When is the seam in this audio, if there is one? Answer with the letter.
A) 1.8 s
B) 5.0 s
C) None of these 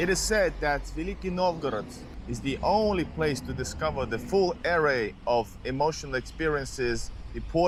C